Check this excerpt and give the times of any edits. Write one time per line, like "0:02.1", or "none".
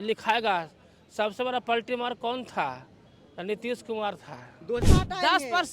0:04.8

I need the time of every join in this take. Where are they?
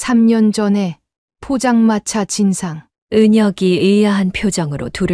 none

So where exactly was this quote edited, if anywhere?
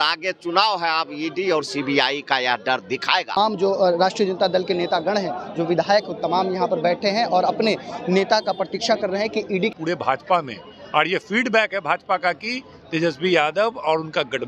0:03.3
0:09.7

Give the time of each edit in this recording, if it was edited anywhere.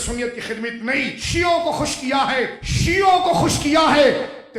0:01.2
0:02.6

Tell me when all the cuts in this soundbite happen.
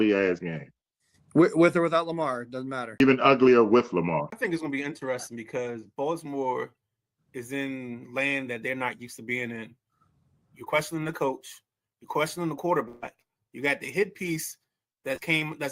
0:03.0
0:04.4

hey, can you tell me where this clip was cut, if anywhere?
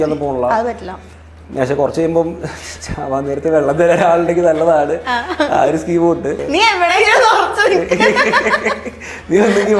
0:06.4

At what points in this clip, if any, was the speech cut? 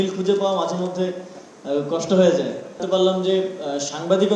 0:02.8

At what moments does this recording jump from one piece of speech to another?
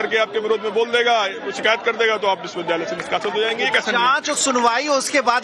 none

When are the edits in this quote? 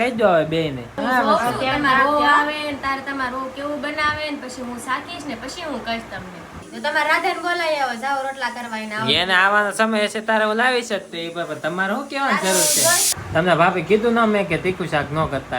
0:00.9
0:06.7
0:13.0

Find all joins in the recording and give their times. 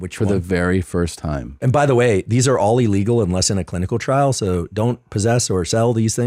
0:01.5

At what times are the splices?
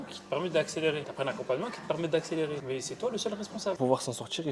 0:01.1
0:02.6
0:03.8

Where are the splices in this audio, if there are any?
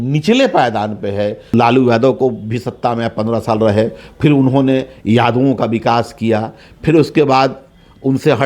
0:01.5

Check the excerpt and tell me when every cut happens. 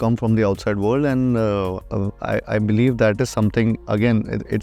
0:01.8

